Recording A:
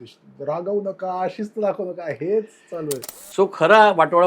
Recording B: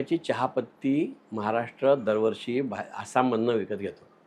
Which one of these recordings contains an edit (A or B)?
A